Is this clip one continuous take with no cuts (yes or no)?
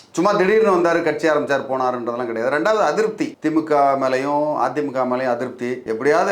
yes